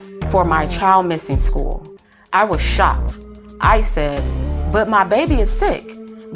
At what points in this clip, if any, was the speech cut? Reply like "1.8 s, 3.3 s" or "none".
1.9 s